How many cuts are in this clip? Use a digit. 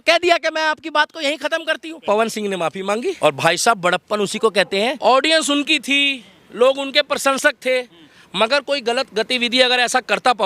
3